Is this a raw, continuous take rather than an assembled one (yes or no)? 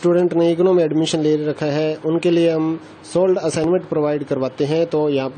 no